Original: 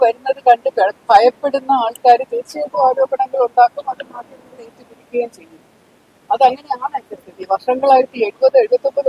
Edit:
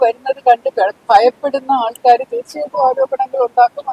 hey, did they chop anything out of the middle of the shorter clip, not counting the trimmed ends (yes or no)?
no